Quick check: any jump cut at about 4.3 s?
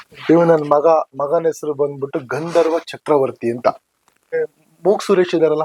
yes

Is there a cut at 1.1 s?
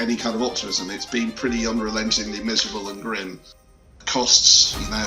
no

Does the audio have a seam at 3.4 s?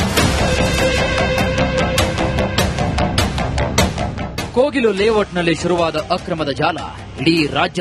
no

